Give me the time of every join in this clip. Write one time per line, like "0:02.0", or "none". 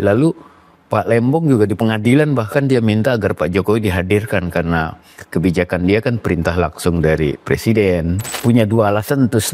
0:08.3